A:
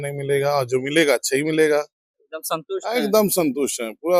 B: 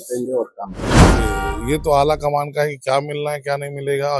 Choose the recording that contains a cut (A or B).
B